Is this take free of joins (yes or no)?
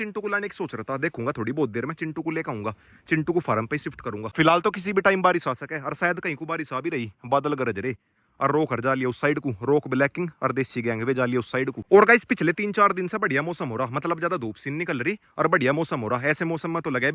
yes